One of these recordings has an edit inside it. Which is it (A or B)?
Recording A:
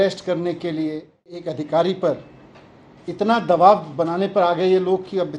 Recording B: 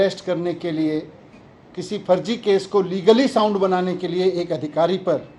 A